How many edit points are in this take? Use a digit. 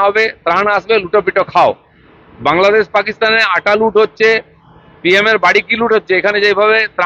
0